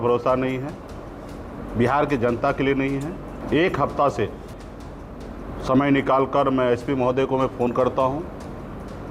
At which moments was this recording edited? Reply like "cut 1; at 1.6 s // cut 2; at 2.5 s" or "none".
cut 1; at 3.3 s